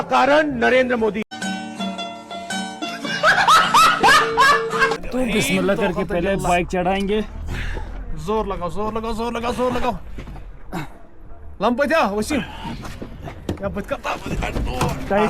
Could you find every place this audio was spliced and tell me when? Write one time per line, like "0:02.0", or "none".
0:01.3
0:05.0